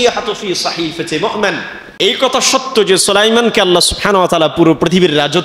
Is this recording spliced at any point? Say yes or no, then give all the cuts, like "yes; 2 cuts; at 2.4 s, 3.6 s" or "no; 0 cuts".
yes; 1 cut; at 2.0 s